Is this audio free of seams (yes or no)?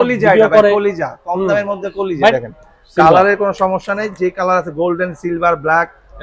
no